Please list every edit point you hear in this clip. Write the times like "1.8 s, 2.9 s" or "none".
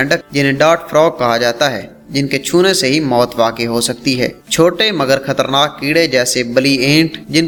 none